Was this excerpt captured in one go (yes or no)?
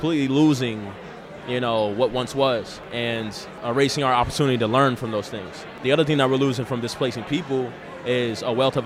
no